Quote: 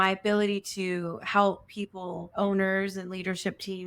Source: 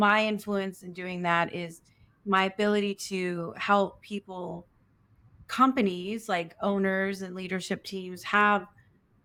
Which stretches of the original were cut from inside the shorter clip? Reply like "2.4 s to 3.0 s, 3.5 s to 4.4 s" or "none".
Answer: 4.6 s to 6.5 s